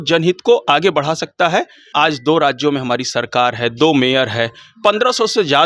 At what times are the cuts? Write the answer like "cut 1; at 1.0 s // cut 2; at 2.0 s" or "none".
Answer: cut 1; at 1.8 s